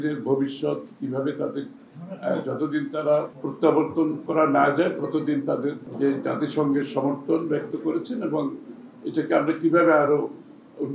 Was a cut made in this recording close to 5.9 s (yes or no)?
yes